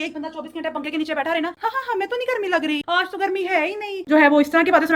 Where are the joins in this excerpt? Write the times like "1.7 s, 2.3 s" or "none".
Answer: 1.6 s, 4.1 s